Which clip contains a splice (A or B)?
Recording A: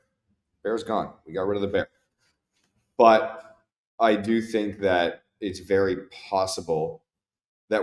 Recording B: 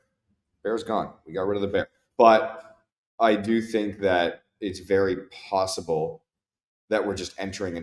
B